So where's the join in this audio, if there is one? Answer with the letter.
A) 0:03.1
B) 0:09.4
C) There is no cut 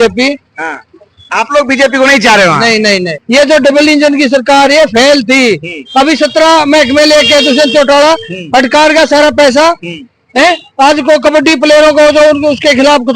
A